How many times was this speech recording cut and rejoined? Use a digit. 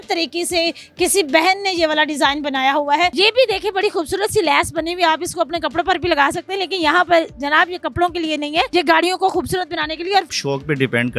3